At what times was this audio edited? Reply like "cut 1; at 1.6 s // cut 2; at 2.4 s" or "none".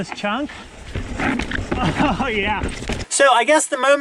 cut 1; at 3.0 s